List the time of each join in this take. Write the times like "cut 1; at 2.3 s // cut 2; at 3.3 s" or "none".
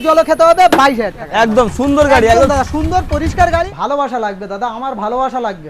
cut 1; at 1.2 s // cut 2; at 3.7 s